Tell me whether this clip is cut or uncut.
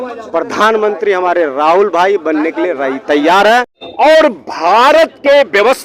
cut